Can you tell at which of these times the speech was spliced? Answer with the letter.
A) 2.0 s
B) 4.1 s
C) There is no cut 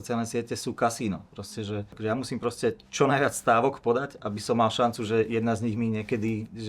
A